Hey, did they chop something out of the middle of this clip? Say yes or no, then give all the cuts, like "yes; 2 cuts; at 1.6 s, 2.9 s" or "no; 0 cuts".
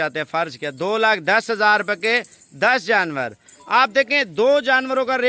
no; 0 cuts